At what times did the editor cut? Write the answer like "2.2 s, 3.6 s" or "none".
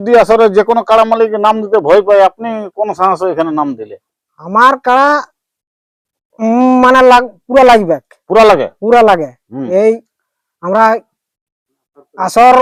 none